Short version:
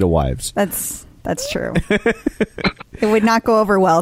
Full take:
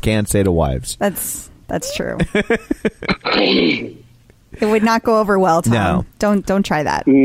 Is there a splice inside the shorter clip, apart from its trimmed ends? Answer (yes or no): yes